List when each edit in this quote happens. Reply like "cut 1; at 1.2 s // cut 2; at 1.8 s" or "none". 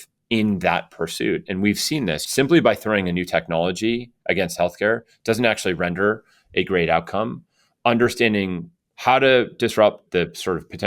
cut 1; at 2.2 s // cut 2; at 10.0 s